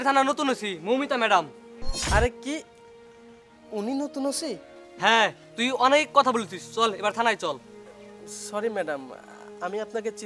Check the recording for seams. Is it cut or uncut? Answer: uncut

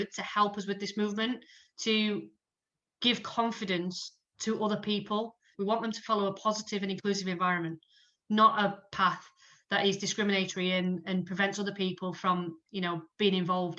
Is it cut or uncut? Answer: cut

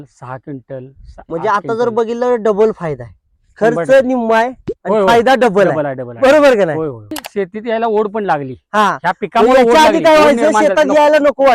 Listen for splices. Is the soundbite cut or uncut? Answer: uncut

